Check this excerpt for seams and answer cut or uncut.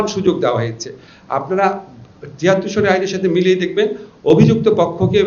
uncut